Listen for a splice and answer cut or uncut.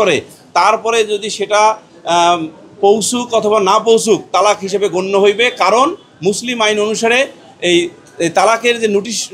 uncut